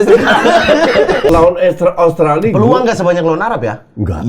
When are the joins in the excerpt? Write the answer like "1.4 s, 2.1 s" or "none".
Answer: 1.3 s